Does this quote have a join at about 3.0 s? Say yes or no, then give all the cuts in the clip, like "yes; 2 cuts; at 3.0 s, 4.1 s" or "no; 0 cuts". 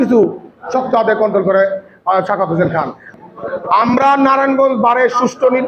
yes; 1 cut; at 3.0 s